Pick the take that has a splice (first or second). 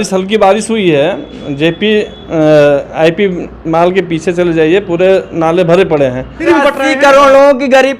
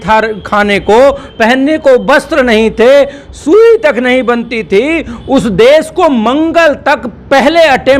first